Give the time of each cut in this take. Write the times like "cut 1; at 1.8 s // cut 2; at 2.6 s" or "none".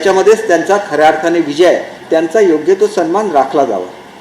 cut 1; at 1.9 s